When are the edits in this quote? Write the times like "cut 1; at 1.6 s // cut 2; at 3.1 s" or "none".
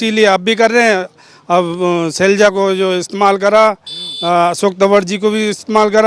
none